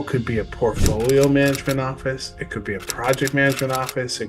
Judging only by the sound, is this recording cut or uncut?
uncut